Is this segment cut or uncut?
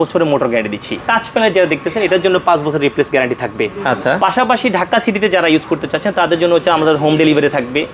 cut